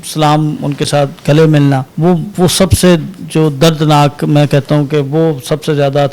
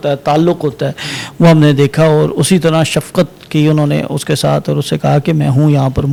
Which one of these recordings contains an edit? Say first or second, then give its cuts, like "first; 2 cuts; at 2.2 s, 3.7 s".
first; 1 cut; at 1.9 s